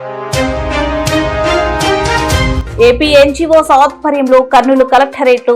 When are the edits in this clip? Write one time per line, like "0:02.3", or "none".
0:02.6